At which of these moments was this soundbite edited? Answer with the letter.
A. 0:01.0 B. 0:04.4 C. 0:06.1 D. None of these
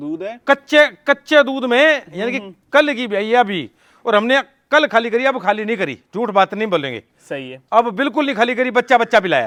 D